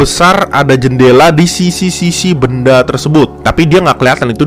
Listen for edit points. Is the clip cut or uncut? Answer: uncut